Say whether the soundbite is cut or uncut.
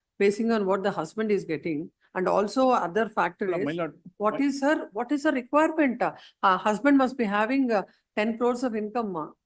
uncut